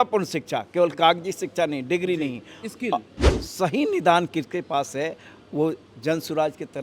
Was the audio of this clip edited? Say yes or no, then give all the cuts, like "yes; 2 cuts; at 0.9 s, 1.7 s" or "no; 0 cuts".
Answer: yes; 1 cut; at 3.3 s